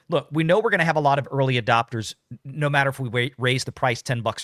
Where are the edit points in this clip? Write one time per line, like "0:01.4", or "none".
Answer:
none